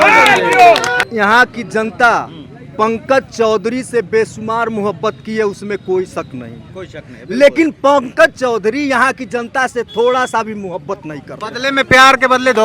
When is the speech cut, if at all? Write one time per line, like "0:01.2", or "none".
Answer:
0:01.0